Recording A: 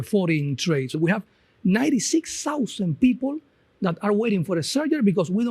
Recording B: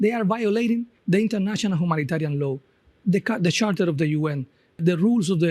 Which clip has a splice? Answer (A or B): B